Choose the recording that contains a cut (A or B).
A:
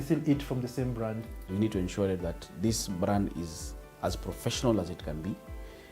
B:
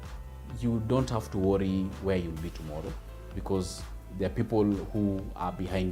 A